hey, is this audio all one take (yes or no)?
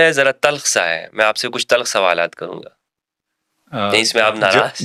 yes